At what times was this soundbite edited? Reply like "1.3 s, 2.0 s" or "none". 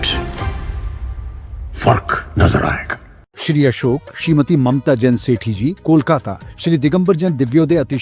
none